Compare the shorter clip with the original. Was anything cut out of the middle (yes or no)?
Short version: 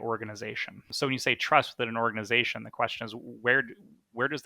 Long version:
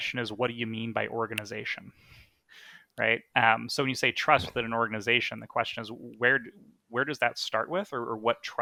yes